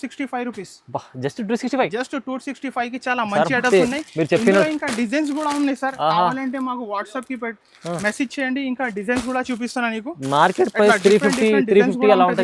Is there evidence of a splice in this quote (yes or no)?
no